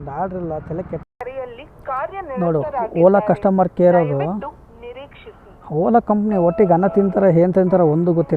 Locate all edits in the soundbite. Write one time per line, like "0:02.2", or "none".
0:01.0